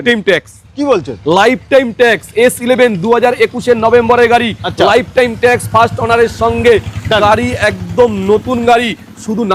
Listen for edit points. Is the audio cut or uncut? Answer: uncut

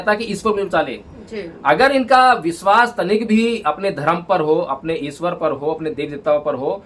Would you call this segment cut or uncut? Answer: uncut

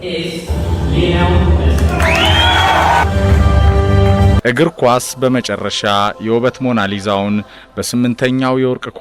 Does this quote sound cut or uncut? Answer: cut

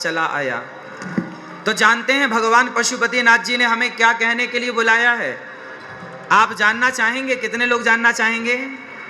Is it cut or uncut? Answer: uncut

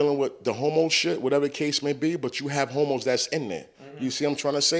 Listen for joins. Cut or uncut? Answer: uncut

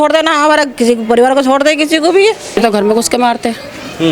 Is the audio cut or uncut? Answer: cut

